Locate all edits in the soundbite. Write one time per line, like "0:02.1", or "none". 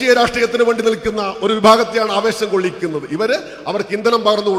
none